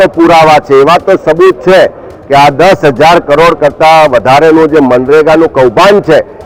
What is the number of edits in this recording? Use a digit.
0